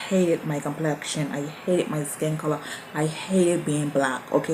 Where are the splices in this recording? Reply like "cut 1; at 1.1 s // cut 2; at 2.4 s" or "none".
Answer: none